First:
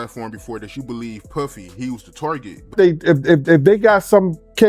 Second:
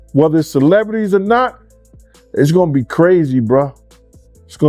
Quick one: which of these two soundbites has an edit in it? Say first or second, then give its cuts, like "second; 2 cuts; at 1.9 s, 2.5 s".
first; 1 cut; at 2.7 s